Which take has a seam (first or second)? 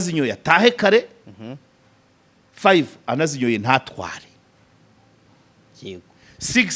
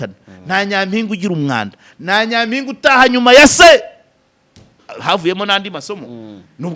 second